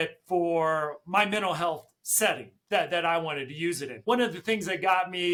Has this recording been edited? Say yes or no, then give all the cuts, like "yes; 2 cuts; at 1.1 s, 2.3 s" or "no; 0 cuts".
no; 0 cuts